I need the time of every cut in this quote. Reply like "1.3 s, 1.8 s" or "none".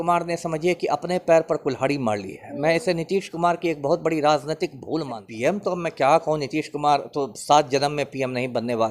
5.3 s